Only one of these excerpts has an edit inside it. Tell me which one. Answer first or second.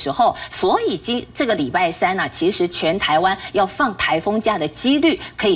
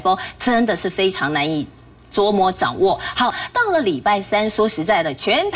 second